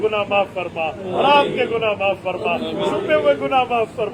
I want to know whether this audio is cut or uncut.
uncut